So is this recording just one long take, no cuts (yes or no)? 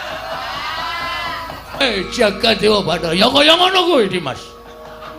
no